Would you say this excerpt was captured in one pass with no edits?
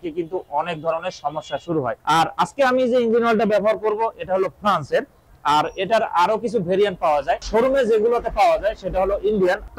yes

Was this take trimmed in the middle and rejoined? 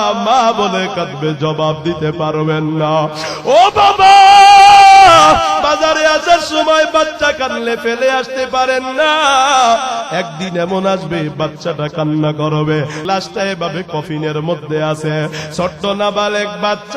yes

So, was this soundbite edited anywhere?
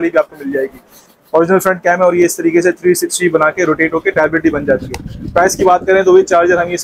no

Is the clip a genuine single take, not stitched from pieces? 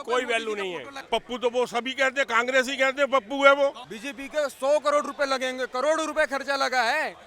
no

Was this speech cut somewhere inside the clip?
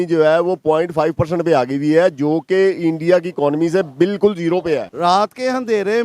yes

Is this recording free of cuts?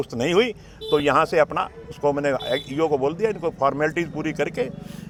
yes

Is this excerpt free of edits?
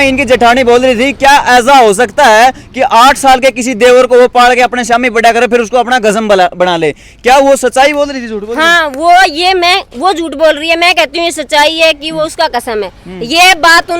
yes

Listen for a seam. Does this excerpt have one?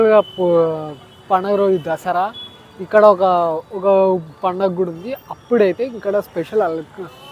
no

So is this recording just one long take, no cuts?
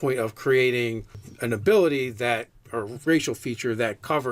yes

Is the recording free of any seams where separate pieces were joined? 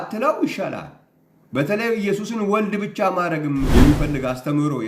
no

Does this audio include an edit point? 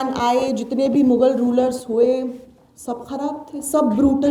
no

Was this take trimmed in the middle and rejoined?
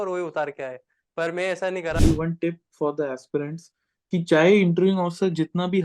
yes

